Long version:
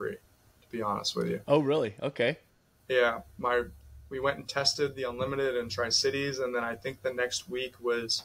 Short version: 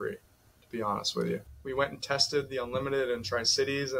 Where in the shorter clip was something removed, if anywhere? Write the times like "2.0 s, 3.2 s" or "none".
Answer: 1.4 s